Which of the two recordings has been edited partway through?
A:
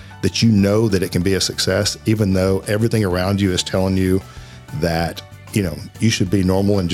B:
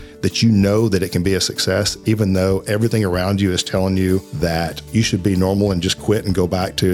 B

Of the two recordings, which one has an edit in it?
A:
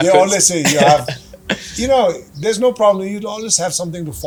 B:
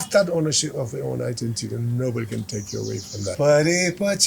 B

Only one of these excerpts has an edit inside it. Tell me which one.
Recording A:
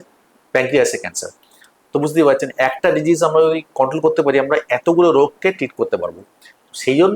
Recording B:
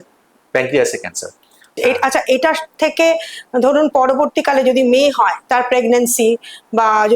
B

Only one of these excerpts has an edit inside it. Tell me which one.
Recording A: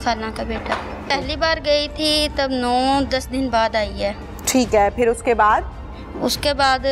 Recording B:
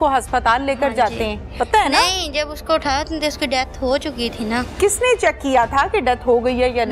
A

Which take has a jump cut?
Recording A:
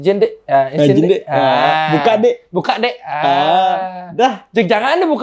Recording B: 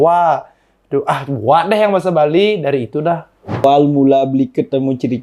B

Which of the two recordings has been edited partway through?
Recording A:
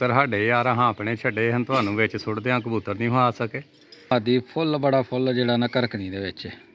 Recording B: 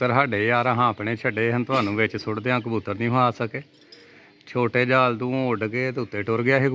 A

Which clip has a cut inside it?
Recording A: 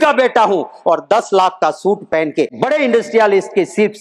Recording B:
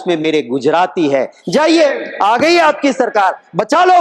A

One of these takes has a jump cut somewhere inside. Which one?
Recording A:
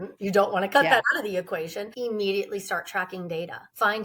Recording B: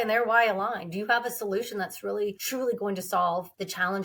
A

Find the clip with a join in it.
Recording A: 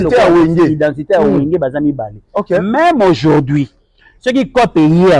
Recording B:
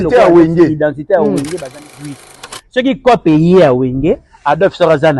B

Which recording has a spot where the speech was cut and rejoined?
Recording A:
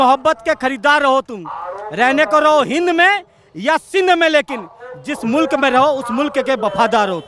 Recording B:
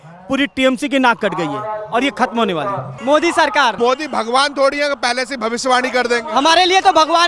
B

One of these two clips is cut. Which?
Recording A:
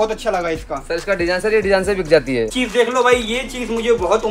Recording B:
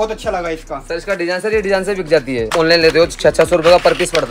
A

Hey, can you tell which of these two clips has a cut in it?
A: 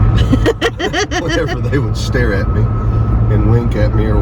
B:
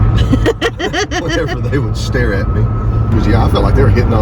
B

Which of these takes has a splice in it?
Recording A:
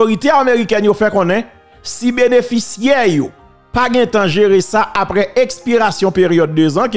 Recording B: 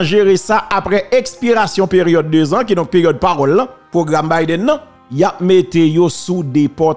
B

